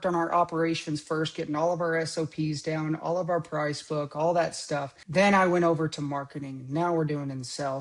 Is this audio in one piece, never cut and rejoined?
no; 1 cut; at 5.0 s

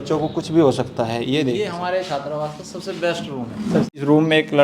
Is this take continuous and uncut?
no; 2 cuts; at 1.7 s, 3.9 s

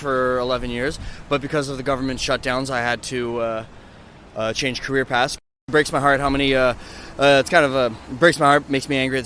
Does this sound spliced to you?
yes; 1 cut; at 5.6 s

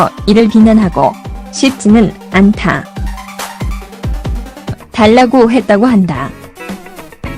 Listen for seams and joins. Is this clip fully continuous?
yes; 0 cuts

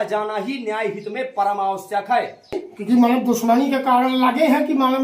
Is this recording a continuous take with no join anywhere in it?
no; 1 cut; at 2.7 s

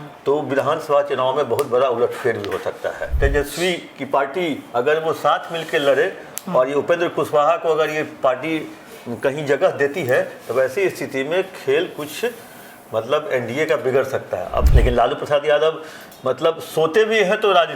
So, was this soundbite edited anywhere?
yes; 2 cuts; at 3.1 s, 14.7 s

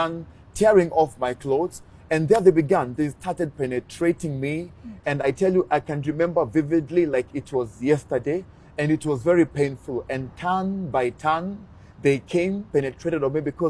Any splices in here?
no; 0 cuts

